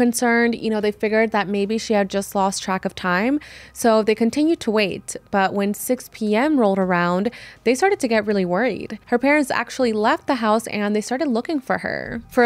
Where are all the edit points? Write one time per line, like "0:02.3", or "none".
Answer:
0:08.9